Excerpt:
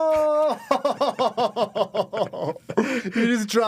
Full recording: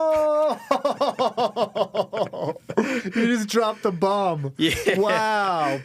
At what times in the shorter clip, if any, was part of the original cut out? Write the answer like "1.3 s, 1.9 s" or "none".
none